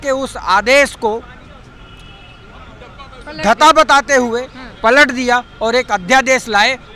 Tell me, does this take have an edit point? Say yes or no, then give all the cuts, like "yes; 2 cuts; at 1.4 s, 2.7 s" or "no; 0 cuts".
no; 0 cuts